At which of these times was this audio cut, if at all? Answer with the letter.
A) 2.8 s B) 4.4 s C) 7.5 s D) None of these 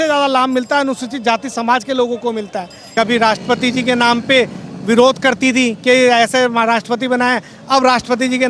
A